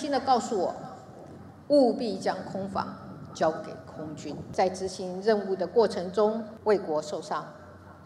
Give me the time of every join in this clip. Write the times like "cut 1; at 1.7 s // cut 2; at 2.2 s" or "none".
cut 1; at 4.5 s // cut 2; at 6.5 s